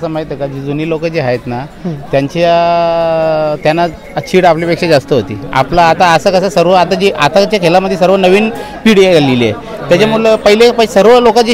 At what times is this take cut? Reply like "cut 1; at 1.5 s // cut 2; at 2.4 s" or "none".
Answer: none